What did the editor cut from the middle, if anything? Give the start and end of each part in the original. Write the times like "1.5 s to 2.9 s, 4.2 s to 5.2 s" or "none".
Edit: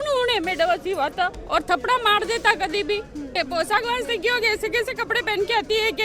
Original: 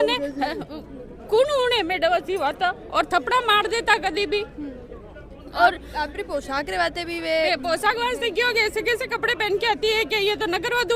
4.8 s to 7.5 s